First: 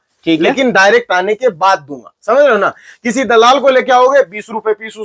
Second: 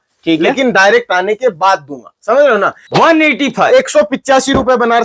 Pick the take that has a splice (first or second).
second